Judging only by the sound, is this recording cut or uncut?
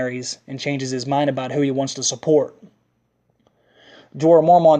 uncut